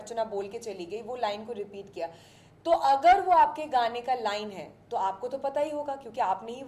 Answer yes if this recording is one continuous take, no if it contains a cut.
yes